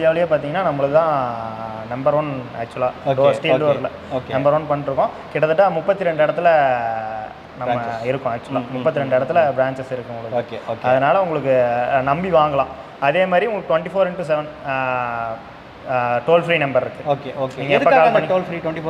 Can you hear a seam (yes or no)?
no